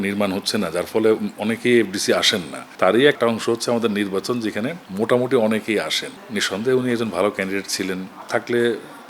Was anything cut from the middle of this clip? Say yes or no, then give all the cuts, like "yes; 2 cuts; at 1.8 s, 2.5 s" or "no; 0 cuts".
yes; 3 cuts; at 2.7 s, 6.0 s, 8.1 s